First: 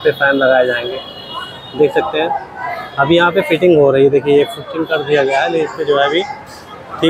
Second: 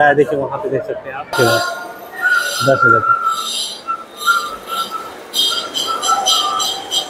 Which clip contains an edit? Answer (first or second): second